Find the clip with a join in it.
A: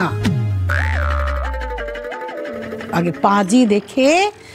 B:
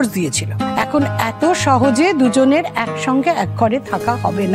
A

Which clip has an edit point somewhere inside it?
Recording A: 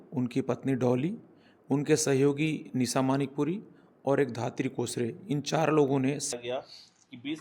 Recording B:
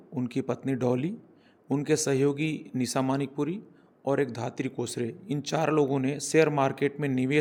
A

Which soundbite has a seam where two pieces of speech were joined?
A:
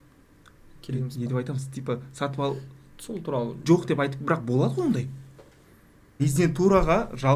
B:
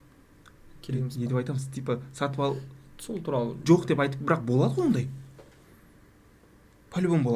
A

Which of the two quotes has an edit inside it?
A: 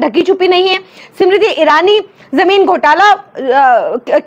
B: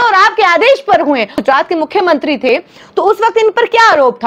B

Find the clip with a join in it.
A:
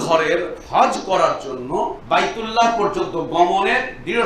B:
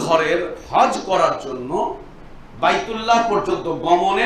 A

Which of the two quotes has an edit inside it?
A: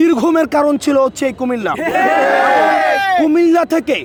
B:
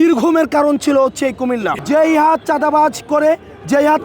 B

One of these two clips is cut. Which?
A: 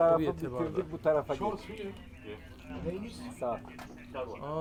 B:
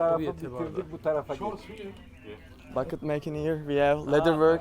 B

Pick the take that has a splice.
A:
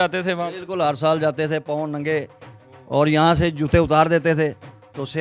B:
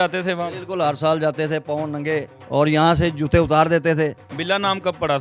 B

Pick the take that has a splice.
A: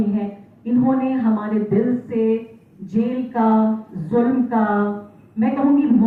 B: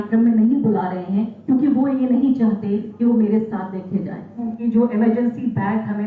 B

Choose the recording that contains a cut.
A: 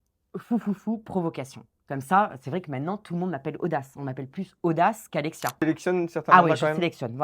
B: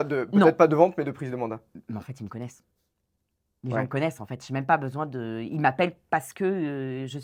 A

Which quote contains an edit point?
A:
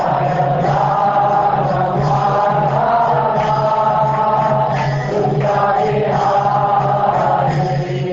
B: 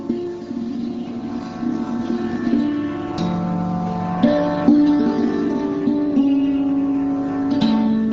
B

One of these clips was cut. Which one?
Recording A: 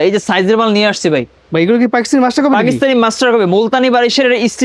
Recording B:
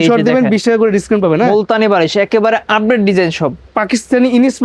B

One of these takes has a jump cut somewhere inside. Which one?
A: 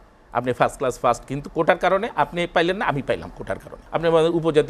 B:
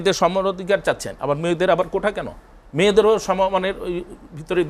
A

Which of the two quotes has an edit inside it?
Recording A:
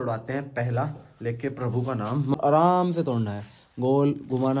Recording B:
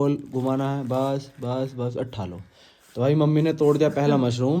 A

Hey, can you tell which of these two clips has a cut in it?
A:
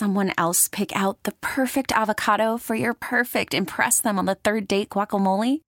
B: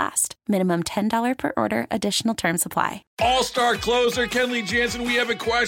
B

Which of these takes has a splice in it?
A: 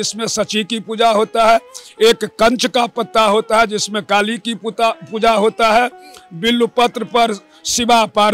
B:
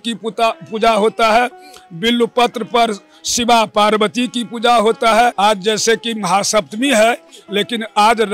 B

